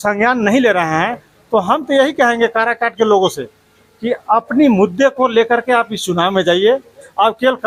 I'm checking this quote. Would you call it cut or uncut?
uncut